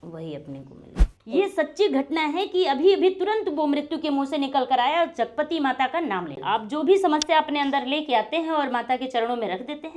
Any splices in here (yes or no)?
yes